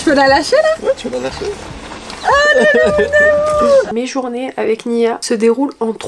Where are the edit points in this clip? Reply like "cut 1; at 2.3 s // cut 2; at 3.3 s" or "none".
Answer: cut 1; at 3.9 s